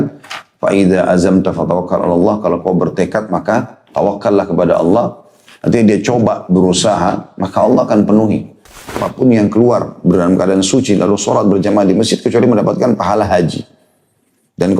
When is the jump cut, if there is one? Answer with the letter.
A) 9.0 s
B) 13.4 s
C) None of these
A